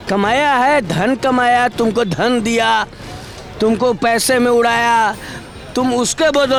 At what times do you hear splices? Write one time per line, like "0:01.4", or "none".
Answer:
none